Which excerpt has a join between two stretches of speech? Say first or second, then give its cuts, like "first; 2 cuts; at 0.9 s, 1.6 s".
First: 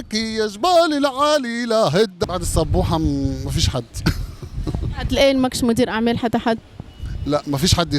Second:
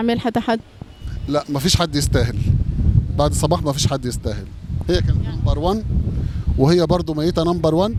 first; 1 cut; at 2.2 s